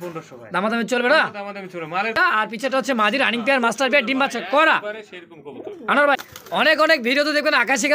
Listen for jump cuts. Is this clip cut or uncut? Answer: cut